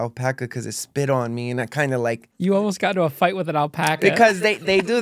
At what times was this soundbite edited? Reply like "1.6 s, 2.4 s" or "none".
2.3 s